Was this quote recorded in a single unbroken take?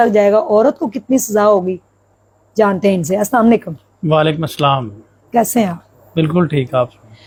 yes; 0 cuts

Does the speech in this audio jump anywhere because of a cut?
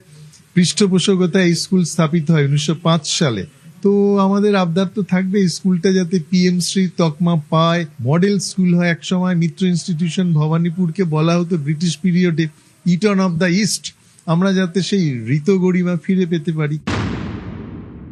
yes; 1 cut; at 16.8 s

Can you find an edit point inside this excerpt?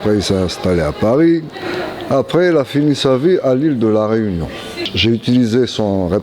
yes; 1 cut; at 4.8 s

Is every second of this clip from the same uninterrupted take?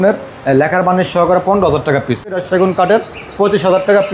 no; 1 cut; at 2.3 s

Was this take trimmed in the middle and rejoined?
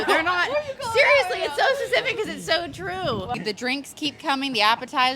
yes; 1 cut; at 3.4 s

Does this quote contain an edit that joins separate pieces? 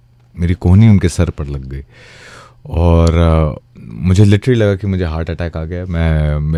no; 0 cuts

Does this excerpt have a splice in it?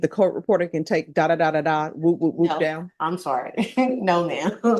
no; 0 cuts

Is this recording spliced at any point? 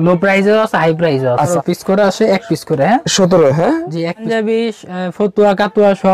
yes; 2 cuts; at 1.5 s, 4.2 s

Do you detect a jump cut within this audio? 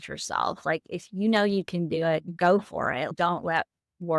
yes; 2 cuts; at 2.3 s, 3.1 s

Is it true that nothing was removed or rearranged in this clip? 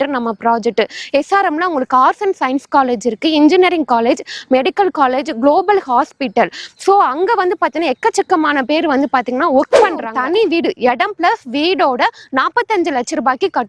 no; 1 cut; at 10.1 s

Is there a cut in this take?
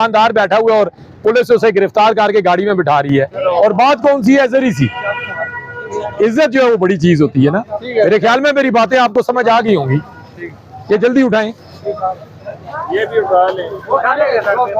no; 0 cuts

